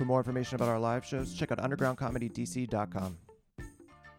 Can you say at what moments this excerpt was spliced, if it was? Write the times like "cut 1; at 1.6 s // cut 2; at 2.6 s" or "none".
cut 1; at 3.2 s